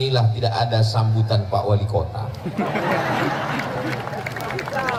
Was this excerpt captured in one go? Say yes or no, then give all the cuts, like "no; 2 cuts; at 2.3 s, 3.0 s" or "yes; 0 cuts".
yes; 0 cuts